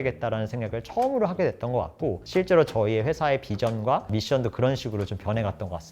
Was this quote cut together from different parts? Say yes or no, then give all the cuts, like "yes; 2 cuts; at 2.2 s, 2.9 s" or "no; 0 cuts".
no; 0 cuts